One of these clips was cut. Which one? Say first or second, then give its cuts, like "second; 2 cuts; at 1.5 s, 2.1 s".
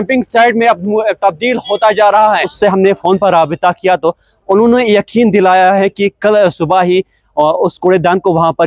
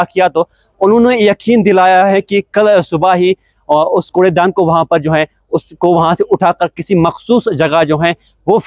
first; 1 cut; at 2.5 s